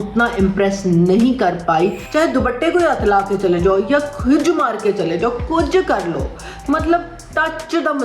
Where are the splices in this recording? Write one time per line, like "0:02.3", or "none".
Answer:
0:02.0